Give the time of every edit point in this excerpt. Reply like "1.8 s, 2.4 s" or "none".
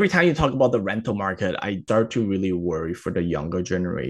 1.8 s